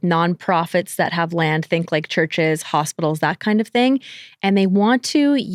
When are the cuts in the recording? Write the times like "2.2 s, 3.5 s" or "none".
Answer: none